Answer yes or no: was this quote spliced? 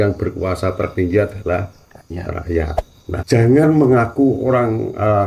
yes